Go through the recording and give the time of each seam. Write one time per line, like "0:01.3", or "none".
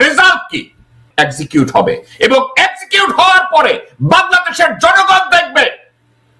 0:01.0